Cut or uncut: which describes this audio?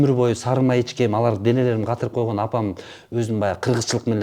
uncut